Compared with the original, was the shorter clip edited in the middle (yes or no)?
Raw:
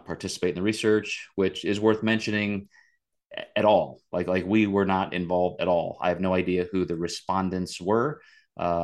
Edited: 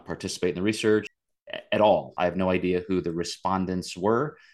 yes